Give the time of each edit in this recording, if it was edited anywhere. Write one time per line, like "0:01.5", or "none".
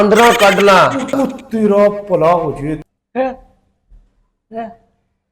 0:02.8